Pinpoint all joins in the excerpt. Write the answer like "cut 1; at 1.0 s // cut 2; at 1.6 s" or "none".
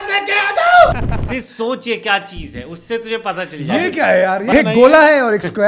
cut 1; at 1.1 s // cut 2; at 4.5 s